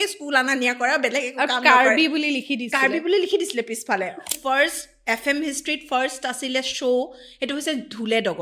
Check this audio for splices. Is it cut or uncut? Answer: cut